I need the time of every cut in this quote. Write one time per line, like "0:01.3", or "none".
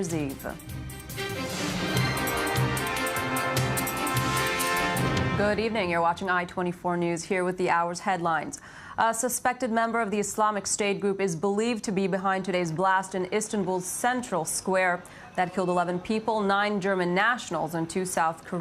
0:05.3